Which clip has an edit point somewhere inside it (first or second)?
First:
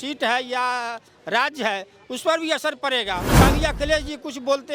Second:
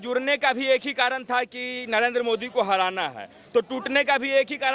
first